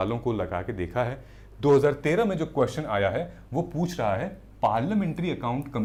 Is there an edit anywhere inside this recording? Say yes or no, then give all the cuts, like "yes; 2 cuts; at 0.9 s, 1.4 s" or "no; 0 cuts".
no; 0 cuts